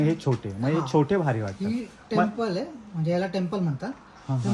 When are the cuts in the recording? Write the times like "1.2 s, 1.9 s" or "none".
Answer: none

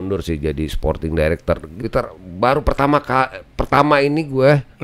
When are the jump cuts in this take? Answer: 1.8 s

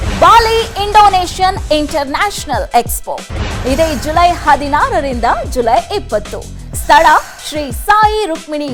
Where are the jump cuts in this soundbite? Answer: none

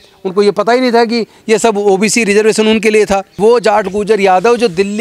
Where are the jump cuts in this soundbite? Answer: 3.3 s

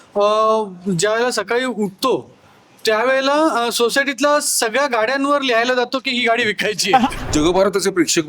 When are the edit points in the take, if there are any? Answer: 7.3 s

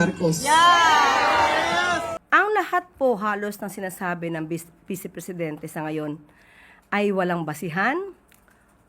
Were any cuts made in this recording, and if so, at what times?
2.1 s

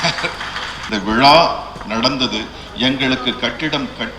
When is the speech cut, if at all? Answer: 0.9 s

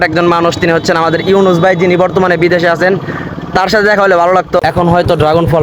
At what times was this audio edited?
4.6 s

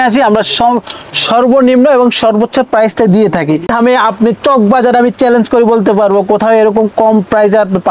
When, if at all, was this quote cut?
3.7 s

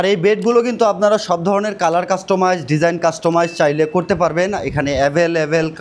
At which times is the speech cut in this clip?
none

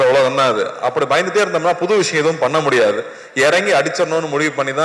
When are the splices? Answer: none

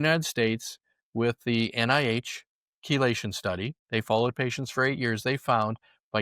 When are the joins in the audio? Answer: 3.7 s

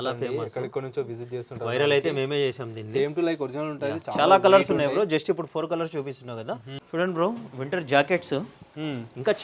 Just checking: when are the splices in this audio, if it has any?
6.7 s

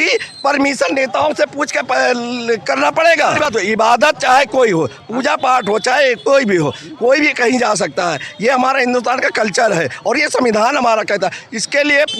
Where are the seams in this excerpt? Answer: 3.5 s

